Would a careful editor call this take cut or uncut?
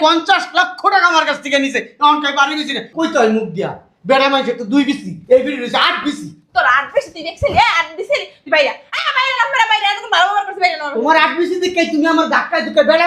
cut